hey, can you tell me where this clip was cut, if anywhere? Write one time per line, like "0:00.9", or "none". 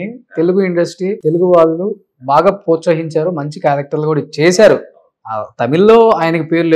0:01.2